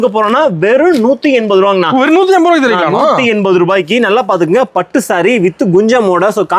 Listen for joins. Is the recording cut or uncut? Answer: uncut